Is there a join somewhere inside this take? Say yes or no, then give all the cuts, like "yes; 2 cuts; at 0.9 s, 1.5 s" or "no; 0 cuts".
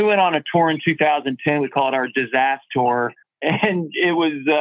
no; 0 cuts